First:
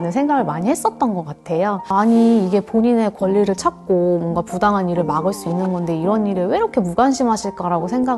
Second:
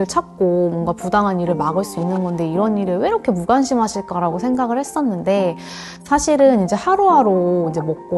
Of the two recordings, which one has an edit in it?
first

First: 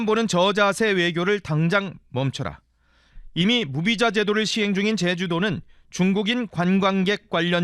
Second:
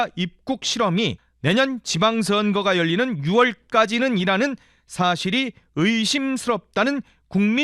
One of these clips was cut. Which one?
second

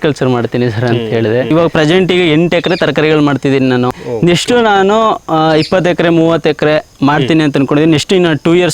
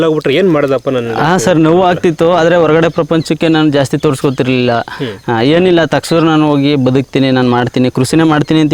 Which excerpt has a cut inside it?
first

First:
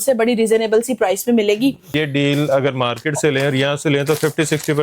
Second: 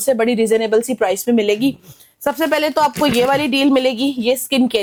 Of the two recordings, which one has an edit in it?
first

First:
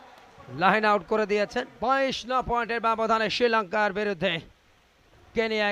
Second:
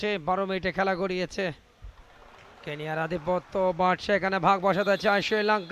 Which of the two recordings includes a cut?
first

